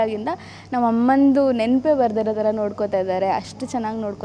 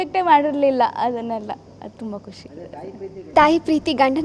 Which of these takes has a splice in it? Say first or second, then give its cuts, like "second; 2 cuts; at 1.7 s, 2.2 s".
second; 1 cut; at 3.3 s